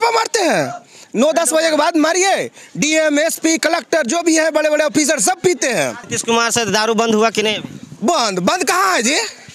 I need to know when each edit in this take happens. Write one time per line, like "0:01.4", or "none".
0:06.1